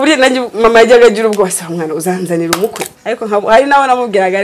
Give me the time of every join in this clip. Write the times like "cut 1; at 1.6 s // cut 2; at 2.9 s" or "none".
cut 1; at 2.9 s